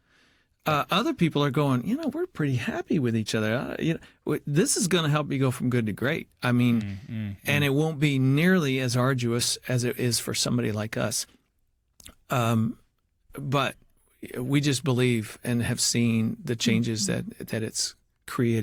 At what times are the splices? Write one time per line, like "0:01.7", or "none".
none